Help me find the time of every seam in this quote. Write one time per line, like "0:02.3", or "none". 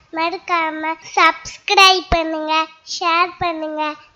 0:01.0